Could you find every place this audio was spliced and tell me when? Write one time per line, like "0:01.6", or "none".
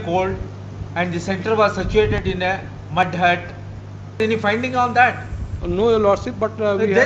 0:04.2